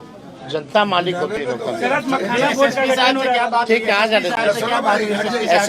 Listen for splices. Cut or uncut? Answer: uncut